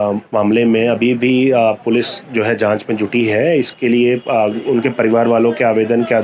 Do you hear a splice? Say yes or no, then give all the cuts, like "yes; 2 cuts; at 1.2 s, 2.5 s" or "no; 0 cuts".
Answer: no; 0 cuts